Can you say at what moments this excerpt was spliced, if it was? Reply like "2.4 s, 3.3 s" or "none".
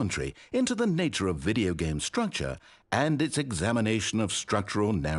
none